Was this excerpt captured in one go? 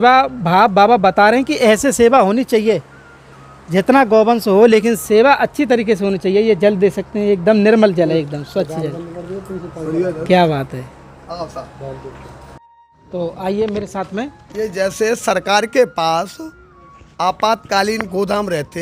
yes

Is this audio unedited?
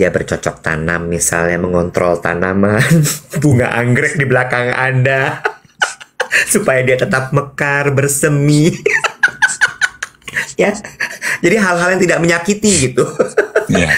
yes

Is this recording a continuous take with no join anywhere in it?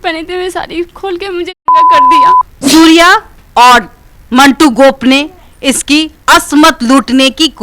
no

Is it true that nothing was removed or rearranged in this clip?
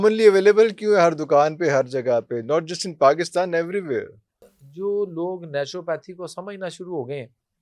no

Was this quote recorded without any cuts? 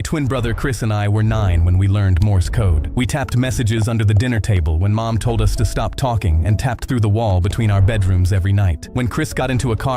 no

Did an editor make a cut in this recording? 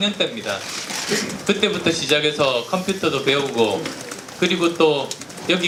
no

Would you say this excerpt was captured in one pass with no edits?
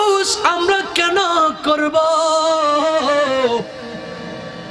yes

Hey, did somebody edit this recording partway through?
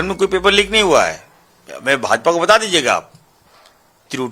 no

